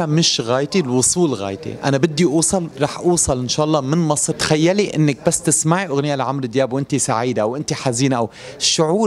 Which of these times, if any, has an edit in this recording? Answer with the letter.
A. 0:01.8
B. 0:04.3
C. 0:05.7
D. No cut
B